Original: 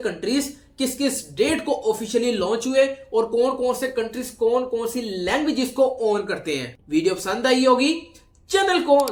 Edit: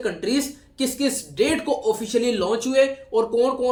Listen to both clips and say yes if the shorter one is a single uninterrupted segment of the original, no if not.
yes